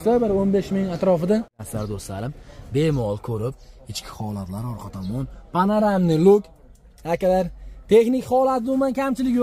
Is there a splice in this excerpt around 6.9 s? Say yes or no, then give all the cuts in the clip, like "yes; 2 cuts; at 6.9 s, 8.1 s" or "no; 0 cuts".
no; 1 cut; at 1.6 s